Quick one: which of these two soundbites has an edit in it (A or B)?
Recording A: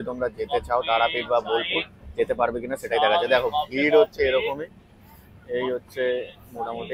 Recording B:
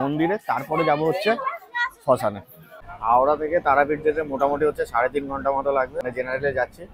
B